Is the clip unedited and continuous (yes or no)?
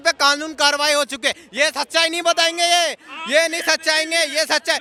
yes